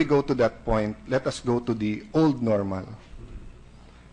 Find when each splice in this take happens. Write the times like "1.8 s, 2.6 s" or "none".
2.0 s